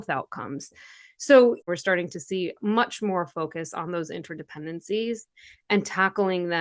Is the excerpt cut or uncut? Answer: cut